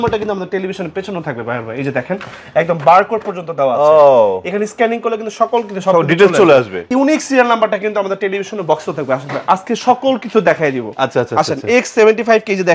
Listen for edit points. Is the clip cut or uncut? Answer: cut